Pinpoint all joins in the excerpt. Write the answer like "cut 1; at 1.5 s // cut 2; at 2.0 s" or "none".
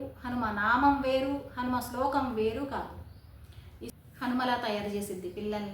cut 1; at 3.9 s